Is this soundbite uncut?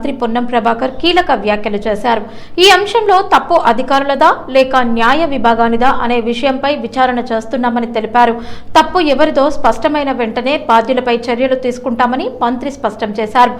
yes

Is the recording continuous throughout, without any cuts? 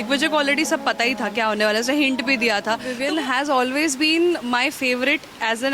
no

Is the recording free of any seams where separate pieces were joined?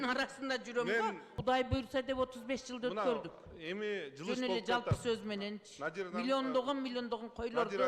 no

